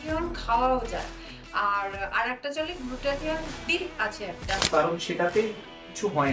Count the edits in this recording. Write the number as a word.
one